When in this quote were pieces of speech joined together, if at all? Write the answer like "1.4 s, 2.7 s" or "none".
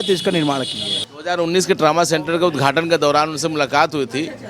1.2 s